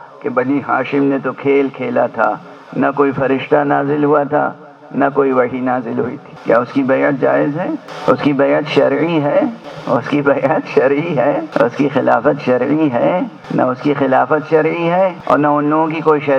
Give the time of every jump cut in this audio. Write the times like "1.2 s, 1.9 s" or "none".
6.3 s, 7.9 s, 9.7 s, 11.5 s, 13.4 s, 15.2 s

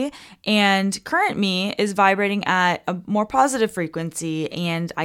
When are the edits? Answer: none

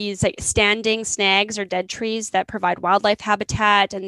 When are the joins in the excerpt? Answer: none

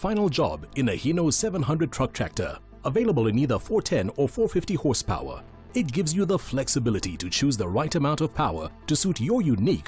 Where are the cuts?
3.4 s

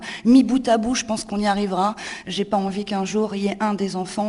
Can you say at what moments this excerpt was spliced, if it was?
2.2 s

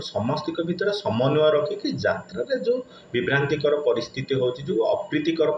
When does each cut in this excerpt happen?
none

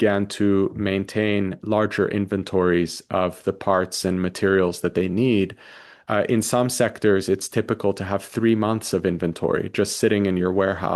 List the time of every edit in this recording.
none

